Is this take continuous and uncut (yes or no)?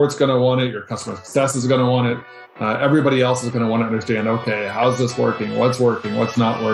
yes